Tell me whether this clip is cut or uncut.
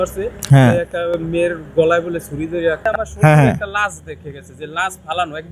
cut